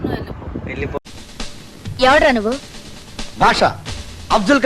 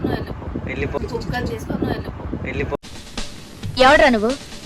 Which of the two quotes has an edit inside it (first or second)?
first